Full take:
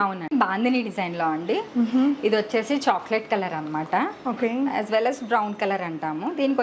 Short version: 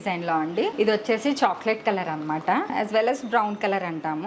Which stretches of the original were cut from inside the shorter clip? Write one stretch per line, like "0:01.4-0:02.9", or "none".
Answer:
0:01.7-0:02.2
0:04.2-0:04.7